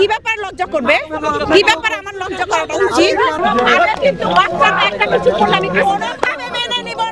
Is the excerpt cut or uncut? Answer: cut